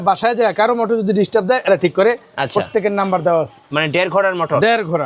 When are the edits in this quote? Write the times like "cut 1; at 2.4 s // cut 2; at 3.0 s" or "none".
cut 1; at 3.7 s